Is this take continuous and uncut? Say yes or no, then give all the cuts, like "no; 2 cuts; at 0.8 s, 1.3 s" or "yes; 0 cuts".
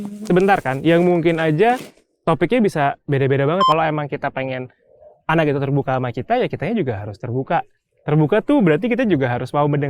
no; 1 cut; at 3.7 s